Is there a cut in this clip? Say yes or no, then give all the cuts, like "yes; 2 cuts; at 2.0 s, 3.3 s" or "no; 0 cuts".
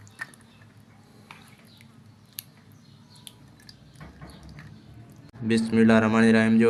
no; 0 cuts